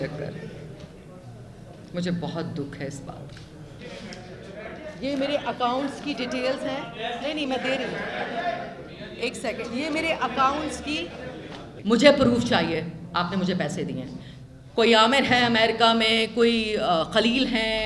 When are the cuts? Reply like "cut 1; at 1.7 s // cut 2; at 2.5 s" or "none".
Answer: cut 1; at 3.8 s // cut 2; at 11.7 s